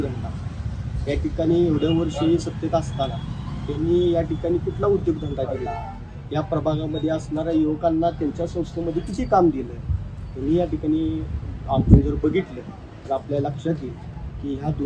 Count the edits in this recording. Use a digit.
0